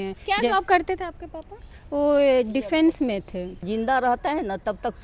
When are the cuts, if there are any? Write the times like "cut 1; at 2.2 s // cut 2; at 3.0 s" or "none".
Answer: cut 1; at 3.6 s

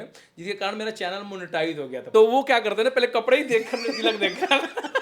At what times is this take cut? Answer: cut 1; at 2.0 s

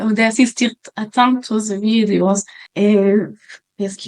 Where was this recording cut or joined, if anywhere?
cut 1; at 2.6 s

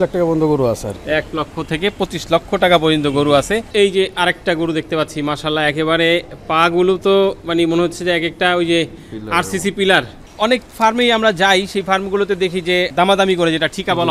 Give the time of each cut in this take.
cut 1; at 3.7 s // cut 2; at 10.2 s

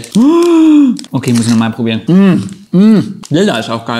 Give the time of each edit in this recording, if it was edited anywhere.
cut 1; at 2.0 s // cut 2; at 3.2 s

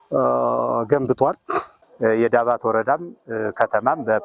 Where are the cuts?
cut 1; at 1.8 s

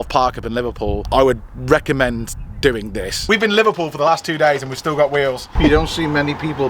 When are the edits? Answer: cut 1; at 1.1 s // cut 2; at 3.1 s // cut 3; at 5.5 s

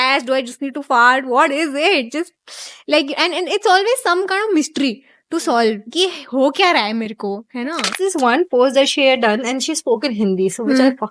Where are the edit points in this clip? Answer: cut 1; at 8.0 s

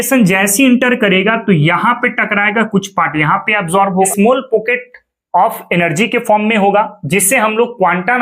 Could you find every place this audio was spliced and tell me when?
cut 1; at 4.1 s

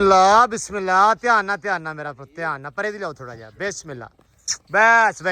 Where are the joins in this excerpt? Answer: none

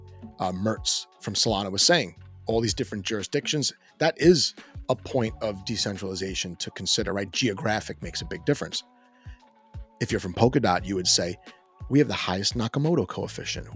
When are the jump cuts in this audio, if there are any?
none

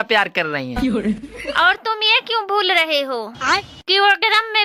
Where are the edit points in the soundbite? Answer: none

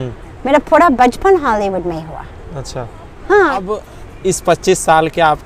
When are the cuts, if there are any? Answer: cut 1; at 3.8 s

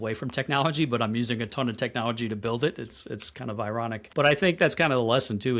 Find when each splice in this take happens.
cut 1; at 4.6 s

